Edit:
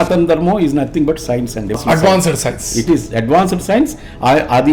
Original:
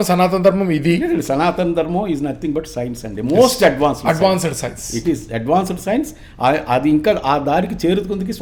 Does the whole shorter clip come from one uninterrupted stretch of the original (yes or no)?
no